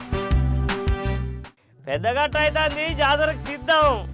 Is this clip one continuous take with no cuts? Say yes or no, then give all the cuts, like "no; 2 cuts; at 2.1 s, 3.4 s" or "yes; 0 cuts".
no; 1 cut; at 1.5 s